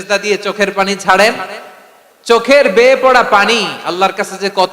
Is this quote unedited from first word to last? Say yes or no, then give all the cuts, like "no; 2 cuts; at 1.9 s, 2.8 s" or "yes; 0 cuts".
yes; 0 cuts